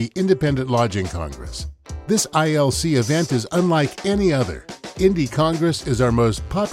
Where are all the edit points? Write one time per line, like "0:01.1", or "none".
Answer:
none